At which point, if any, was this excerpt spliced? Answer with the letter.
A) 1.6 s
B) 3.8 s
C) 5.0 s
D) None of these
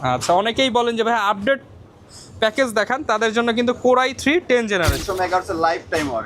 C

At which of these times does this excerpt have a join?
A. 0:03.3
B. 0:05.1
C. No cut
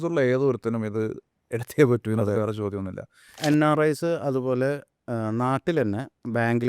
A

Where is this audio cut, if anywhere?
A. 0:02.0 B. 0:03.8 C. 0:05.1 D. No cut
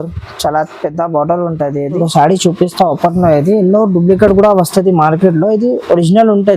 A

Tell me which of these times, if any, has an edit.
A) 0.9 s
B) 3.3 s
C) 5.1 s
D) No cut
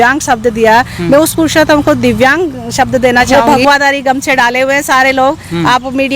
B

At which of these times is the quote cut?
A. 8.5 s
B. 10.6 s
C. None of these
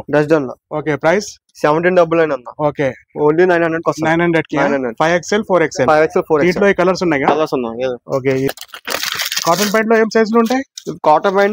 A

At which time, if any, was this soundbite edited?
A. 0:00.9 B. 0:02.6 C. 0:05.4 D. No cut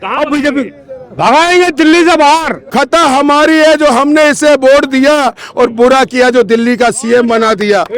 B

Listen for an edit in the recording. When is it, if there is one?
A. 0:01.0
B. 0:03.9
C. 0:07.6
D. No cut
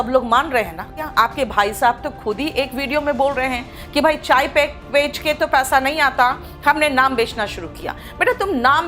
A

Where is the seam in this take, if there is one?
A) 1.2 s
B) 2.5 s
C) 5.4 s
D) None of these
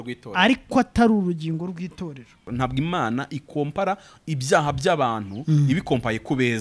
B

